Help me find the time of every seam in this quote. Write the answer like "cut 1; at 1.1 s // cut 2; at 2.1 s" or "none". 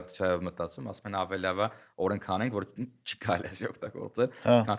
none